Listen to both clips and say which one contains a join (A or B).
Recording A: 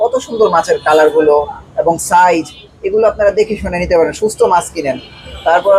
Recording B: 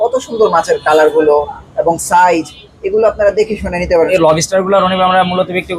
B